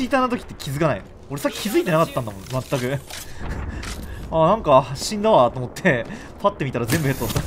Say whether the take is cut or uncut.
uncut